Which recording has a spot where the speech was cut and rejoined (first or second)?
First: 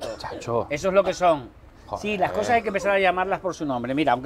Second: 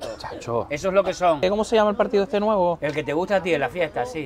second